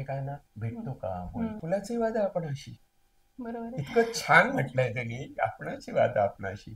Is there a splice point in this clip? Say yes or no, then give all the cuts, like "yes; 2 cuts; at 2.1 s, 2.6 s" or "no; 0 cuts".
yes; 1 cut; at 1.6 s